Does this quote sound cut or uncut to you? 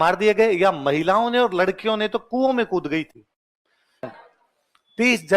cut